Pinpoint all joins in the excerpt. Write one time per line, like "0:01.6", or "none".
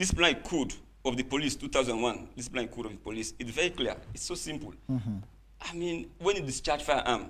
none